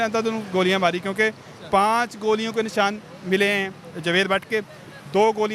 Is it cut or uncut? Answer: uncut